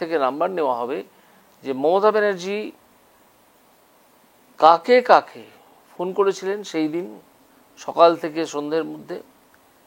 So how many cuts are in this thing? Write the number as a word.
zero